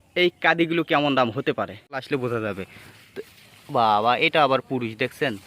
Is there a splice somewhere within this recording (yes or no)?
yes